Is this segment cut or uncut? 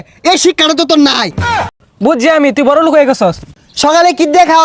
cut